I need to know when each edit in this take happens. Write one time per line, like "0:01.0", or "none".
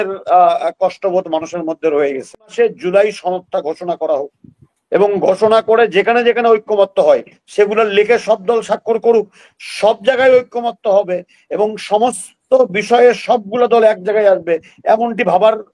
0:02.5